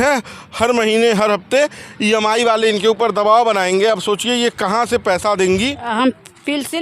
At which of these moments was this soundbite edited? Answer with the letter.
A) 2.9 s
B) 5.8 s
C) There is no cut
B